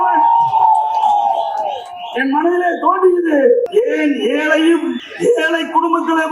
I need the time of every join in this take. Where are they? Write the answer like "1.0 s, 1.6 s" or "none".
3.7 s, 5.0 s